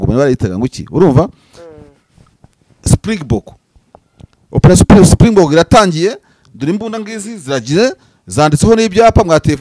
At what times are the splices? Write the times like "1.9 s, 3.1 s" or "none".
none